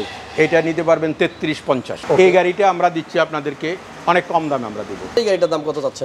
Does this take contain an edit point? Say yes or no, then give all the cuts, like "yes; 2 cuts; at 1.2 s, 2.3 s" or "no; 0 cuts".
yes; 2 cuts; at 1.9 s, 5.2 s